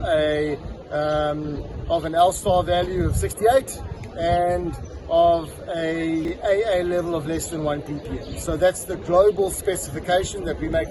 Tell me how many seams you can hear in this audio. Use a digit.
1